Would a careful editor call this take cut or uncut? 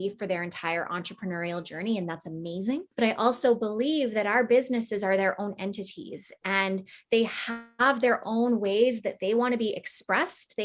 uncut